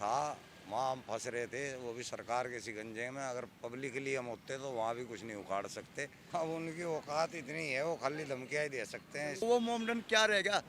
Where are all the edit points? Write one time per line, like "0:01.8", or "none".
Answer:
0:06.1
0:09.4